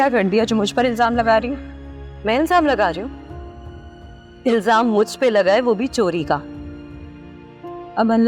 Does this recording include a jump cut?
no; 0 cuts

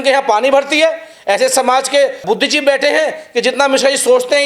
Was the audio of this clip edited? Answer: yes; 1 cut; at 2.2 s

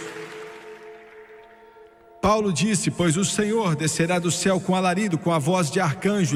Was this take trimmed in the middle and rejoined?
no; 0 cuts

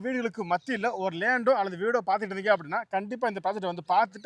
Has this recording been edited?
no; 0 cuts

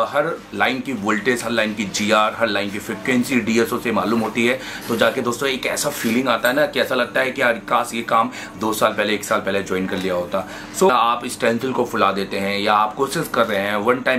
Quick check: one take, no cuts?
no; 1 cut; at 10.9 s

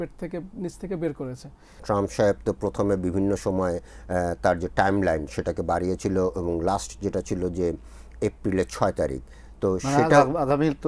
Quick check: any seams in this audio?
yes; 1 cut; at 1.8 s

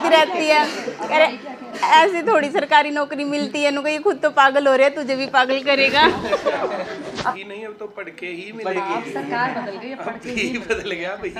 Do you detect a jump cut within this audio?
yes; 1 cut; at 7.4 s

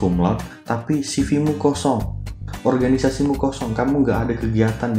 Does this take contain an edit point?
no; 0 cuts

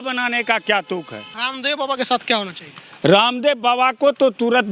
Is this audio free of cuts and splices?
no; 1 cut; at 1.4 s

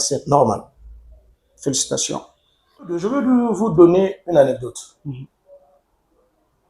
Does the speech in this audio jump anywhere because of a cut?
yes; 1 cut; at 3.0 s

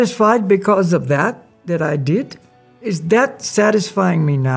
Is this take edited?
no; 0 cuts

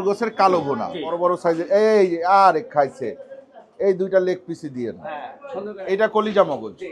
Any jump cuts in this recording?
yes; 1 cut; at 1.2 s

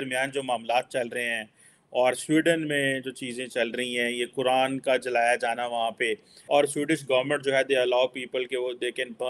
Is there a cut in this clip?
yes; 1 cut; at 6.3 s

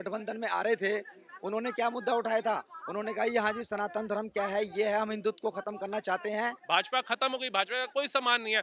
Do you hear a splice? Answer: yes; 1 cut; at 6.6 s

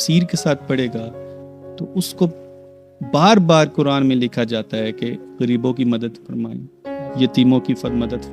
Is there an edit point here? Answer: no; 0 cuts

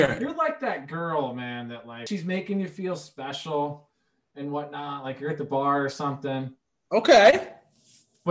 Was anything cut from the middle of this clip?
yes; 1 cut; at 1.9 s

